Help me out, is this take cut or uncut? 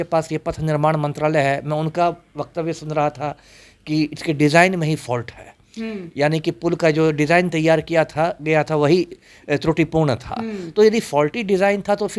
uncut